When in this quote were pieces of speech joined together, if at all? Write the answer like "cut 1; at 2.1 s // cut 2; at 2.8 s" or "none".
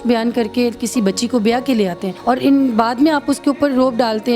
cut 1; at 2.1 s